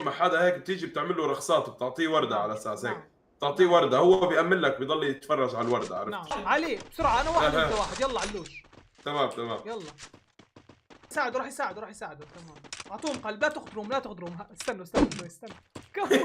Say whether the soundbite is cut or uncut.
cut